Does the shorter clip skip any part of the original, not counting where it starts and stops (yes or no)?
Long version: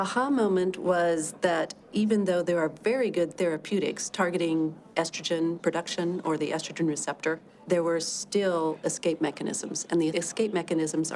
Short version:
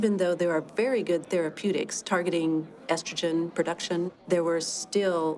yes